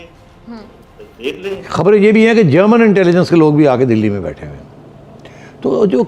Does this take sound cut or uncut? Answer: cut